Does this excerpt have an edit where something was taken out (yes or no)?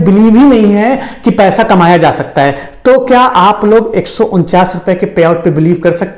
no